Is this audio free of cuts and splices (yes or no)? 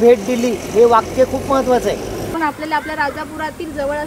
no